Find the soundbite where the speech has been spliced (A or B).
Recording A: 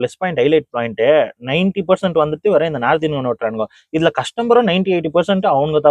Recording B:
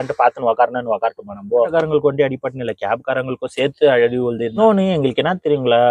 B